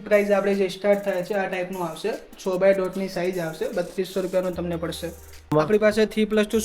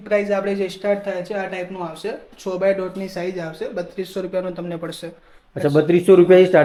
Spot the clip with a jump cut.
first; 1 cut; at 5.5 s

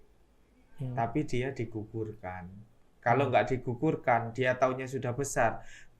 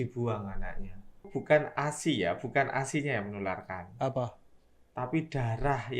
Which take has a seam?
second; 1 cut; at 1.3 s

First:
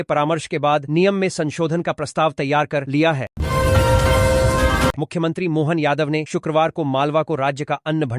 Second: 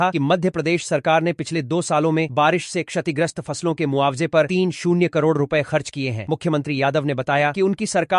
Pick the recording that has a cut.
first; 2 cuts; at 3.3 s, 5.0 s

